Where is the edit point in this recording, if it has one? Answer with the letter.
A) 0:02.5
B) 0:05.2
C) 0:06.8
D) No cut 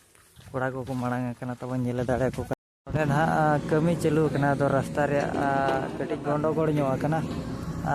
A